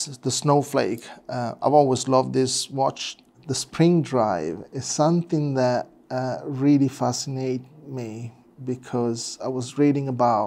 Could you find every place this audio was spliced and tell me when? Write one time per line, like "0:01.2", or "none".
0:03.2